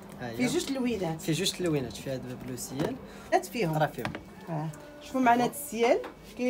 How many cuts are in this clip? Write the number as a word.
one